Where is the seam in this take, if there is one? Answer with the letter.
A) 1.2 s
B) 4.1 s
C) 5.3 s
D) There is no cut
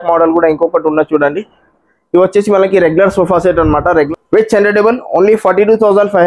B